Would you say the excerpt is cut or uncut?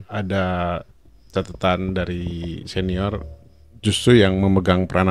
uncut